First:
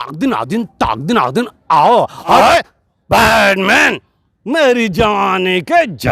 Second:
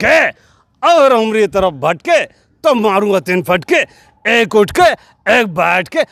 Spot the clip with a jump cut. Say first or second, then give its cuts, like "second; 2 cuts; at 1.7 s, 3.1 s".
first; 1 cut; at 2.3 s